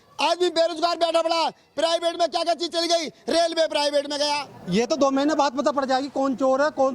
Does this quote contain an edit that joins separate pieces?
yes; 1 cut; at 4.5 s

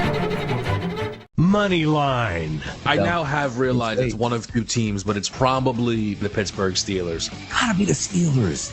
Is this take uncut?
no; 1 cut; at 1.1 s

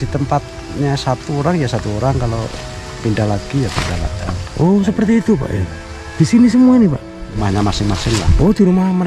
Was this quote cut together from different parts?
yes; 1 cut; at 7.3 s

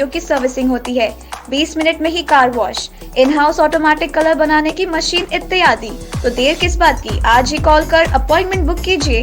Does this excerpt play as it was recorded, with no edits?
yes; 0 cuts

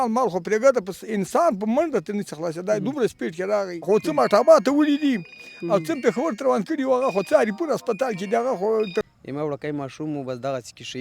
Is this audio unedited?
no; 2 cuts; at 3.9 s, 9.0 s

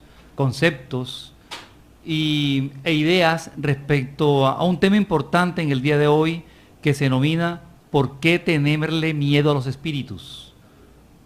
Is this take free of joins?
no; 1 cut; at 1.9 s

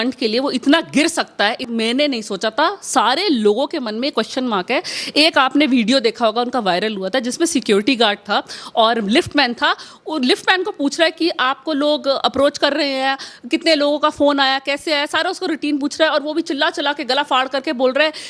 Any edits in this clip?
no; 0 cuts

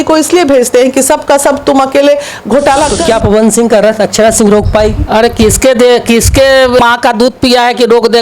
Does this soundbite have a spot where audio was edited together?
yes; 2 cuts; at 2.9 s, 6.8 s

